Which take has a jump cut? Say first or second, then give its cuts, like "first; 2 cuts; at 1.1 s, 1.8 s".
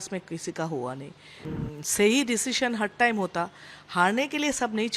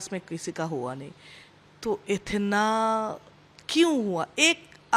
first; 1 cut; at 1.4 s